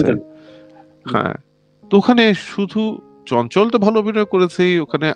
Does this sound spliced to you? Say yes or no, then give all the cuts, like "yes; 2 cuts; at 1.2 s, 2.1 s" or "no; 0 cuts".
no; 0 cuts